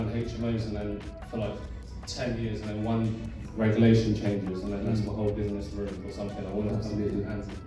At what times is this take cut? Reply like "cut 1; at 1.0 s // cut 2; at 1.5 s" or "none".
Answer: none